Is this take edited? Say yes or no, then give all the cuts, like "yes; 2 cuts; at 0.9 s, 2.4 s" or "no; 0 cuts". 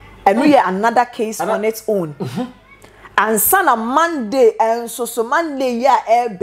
no; 0 cuts